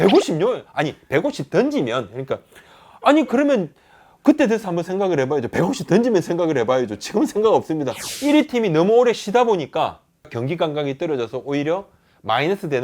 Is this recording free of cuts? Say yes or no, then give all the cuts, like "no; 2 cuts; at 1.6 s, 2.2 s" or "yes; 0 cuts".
no; 1 cut; at 8.0 s